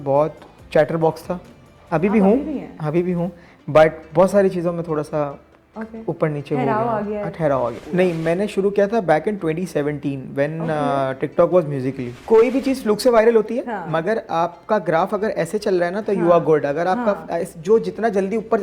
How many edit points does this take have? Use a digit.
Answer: 2